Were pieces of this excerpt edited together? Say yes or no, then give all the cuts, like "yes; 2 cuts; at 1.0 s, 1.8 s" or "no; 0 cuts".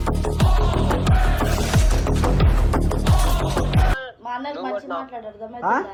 no; 0 cuts